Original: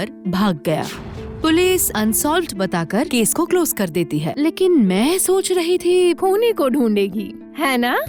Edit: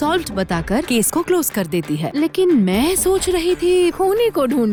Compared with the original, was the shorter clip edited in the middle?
no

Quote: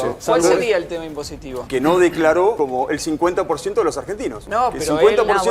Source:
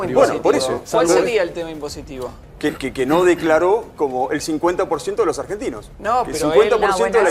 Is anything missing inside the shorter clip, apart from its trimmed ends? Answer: yes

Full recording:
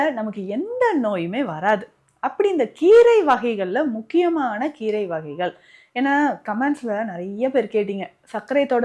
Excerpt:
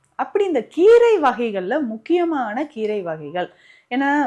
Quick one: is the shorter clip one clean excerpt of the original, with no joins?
yes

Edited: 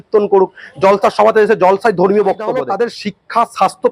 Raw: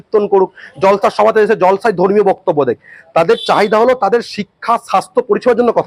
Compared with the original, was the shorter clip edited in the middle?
yes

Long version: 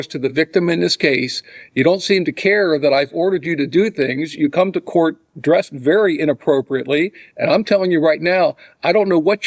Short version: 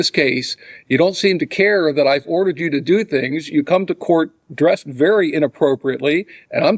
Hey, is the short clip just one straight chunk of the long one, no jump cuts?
yes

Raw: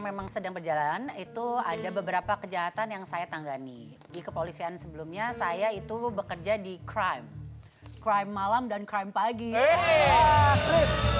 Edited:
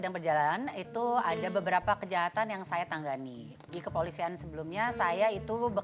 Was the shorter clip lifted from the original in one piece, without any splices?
yes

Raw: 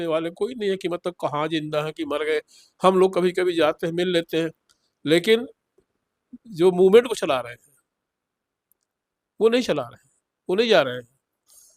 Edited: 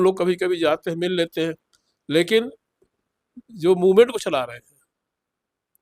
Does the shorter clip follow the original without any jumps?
yes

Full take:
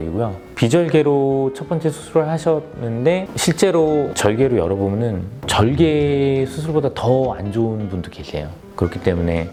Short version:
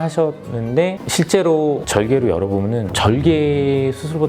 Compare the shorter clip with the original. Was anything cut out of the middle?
yes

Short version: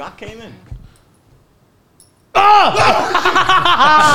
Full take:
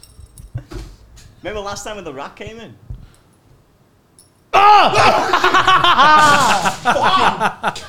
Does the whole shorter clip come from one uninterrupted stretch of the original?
yes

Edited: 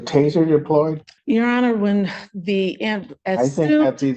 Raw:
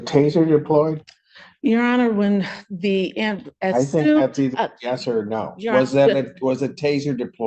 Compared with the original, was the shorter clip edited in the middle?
yes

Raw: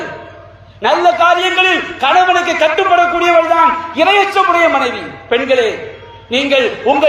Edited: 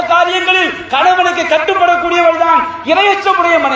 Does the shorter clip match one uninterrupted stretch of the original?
yes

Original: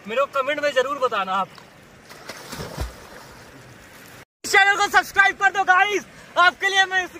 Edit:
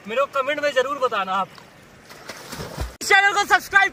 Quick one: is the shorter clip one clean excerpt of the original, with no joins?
no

